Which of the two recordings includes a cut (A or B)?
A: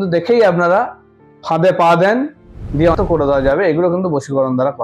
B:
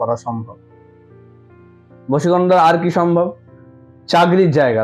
A